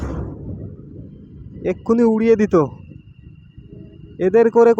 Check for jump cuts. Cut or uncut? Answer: uncut